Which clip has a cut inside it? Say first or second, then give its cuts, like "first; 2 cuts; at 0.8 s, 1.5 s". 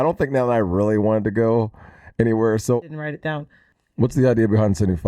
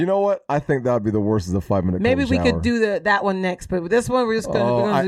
first; 1 cut; at 3.2 s